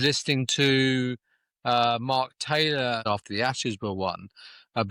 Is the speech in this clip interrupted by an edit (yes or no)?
yes